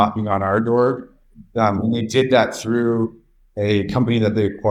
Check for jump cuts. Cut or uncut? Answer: uncut